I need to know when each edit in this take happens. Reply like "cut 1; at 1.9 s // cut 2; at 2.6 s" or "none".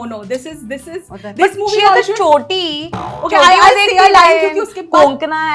none